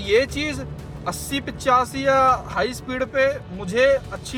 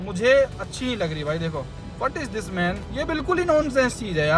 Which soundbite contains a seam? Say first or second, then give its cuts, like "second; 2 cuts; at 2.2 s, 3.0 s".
second; 2 cuts; at 1.8 s, 2.8 s